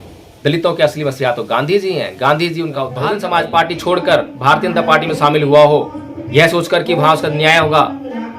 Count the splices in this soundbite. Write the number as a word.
one